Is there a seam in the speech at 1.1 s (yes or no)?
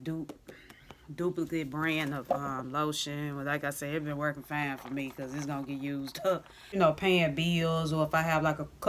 no